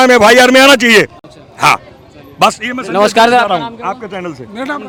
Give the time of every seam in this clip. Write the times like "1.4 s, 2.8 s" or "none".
none

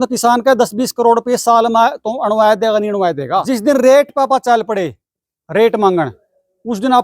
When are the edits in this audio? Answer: 3.5 s

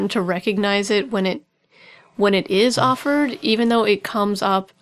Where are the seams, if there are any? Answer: none

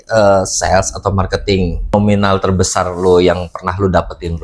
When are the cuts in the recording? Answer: 1.9 s

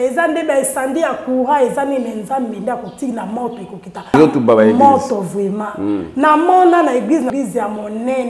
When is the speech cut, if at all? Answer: none

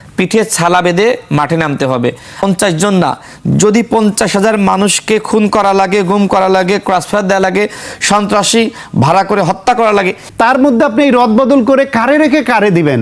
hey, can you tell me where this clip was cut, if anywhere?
2.4 s, 10.2 s

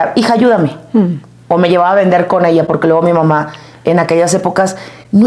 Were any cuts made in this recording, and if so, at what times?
none

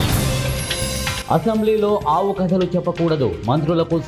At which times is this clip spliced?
1.0 s

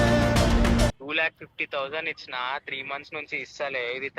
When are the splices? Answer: 1.0 s

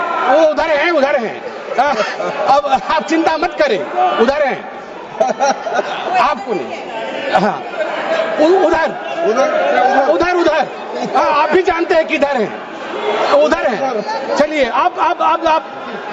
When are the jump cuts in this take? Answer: none

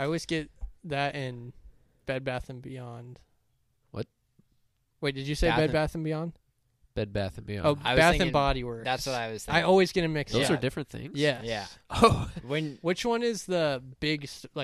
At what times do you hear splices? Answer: none

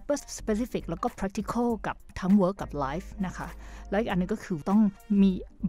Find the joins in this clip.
4.8 s

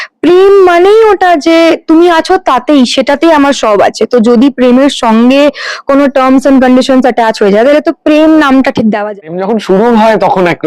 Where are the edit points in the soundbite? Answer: 9.1 s

